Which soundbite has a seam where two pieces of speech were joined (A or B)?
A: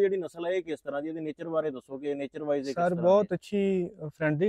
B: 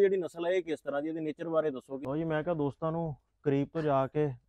B